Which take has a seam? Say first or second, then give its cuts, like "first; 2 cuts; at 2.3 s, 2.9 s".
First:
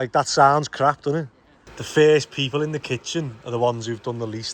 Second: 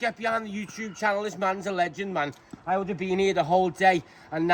first; 1 cut; at 1.7 s